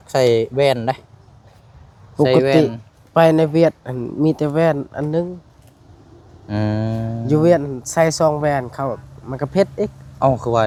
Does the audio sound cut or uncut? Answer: uncut